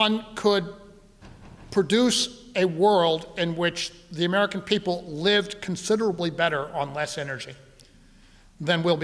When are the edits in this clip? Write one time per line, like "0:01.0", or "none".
none